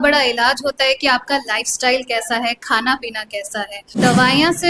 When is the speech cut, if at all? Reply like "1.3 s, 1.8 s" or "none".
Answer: 3.8 s